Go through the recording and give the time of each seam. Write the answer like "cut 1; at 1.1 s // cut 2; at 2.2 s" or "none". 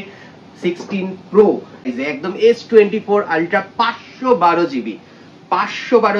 cut 1; at 1.9 s